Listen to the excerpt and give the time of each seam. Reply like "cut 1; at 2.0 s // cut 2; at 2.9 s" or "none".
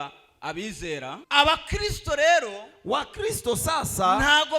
cut 1; at 1.1 s